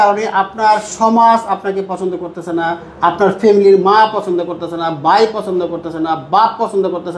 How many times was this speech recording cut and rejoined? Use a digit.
0